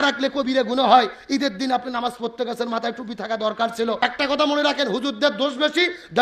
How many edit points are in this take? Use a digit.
1